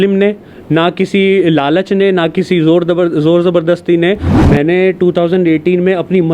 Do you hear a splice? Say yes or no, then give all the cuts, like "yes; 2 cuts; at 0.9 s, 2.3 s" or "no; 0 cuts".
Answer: yes; 1 cut; at 4.3 s